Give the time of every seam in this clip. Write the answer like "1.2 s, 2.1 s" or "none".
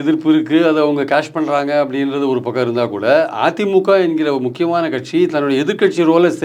none